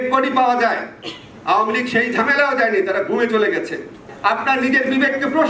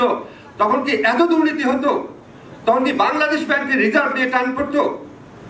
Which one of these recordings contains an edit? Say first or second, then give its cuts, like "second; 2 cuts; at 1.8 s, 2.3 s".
first; 1 cut; at 4.1 s